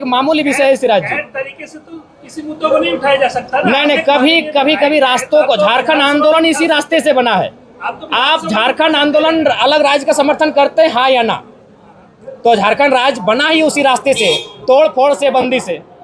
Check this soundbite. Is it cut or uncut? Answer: uncut